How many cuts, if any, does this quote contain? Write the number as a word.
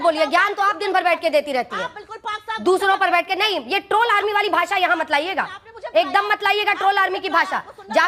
zero